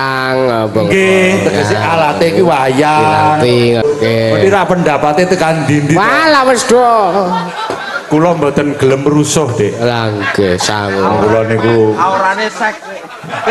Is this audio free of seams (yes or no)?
no